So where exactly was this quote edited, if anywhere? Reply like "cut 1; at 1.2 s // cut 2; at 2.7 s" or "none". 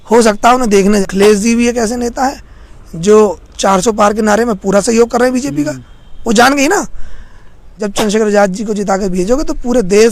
cut 1; at 1.0 s // cut 2; at 7.8 s